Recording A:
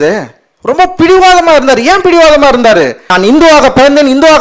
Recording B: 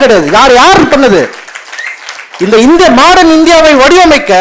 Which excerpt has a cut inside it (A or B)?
A